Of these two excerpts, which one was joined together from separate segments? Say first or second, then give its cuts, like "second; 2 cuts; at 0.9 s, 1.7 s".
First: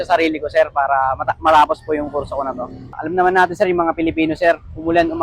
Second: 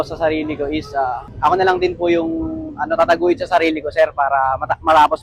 first; 1 cut; at 2.8 s